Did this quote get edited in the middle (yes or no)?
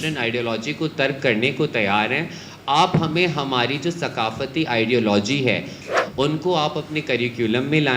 yes